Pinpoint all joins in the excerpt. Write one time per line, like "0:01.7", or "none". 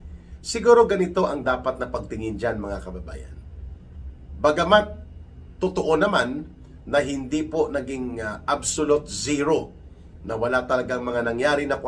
none

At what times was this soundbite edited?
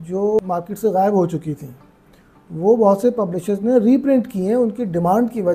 none

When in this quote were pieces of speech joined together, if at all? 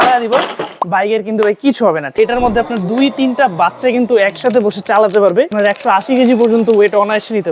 0:02.1
0:05.5

